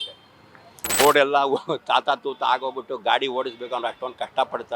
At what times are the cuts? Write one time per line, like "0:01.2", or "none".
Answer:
0:01.0